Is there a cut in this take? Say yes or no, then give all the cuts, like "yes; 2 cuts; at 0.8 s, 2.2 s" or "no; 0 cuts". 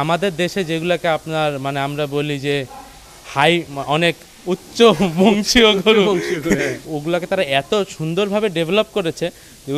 no; 0 cuts